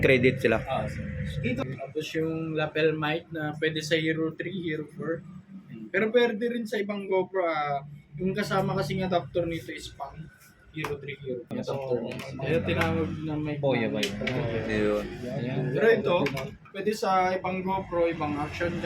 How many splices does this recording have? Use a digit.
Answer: 2